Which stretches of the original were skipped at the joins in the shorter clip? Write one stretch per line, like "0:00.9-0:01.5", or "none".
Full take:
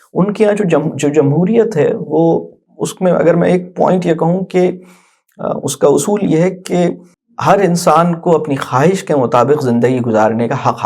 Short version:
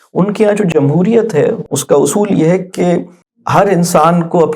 0:00.7-0:01.1
0:02.1-0:05.6